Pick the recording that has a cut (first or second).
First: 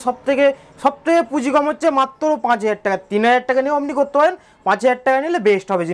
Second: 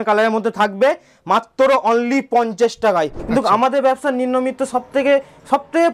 second